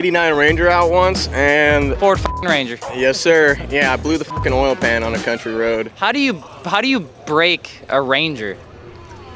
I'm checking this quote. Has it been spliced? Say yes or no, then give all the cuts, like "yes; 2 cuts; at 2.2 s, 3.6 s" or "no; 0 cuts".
no; 0 cuts